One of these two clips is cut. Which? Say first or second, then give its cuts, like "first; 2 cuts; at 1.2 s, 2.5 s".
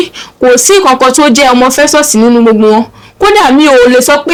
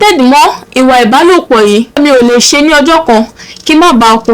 second; 1 cut; at 2.0 s